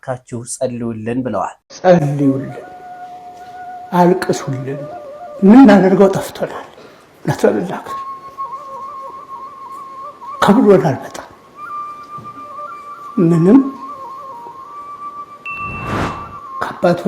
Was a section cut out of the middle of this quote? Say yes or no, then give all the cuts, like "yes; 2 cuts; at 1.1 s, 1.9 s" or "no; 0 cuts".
yes; 1 cut; at 1.6 s